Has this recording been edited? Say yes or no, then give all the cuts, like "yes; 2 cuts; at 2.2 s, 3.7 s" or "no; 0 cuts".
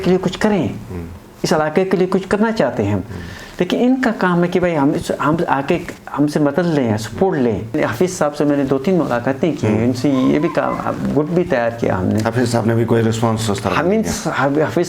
yes; 1 cut; at 7.8 s